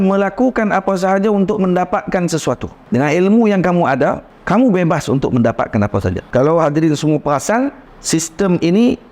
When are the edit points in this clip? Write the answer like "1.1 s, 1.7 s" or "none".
2.7 s, 4.3 s, 6.2 s, 7.9 s